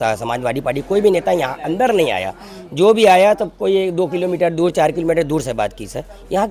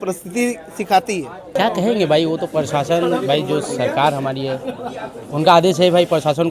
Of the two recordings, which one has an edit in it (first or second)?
second